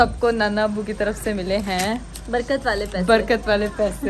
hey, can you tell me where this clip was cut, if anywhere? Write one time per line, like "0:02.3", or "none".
none

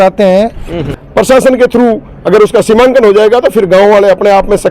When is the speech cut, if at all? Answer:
0:01.0

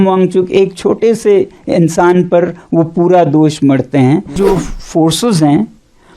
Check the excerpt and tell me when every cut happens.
0:04.3

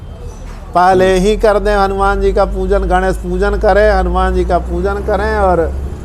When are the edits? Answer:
none

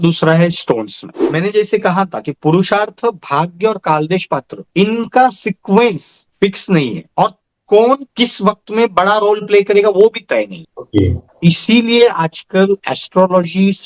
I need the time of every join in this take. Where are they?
0:01.2

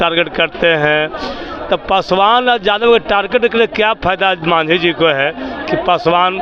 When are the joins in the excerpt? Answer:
none

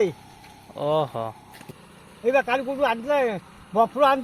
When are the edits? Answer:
0:01.5

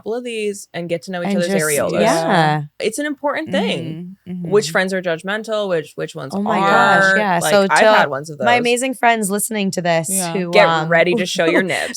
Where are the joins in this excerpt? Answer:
0:02.8

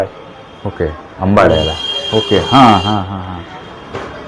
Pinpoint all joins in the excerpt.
none

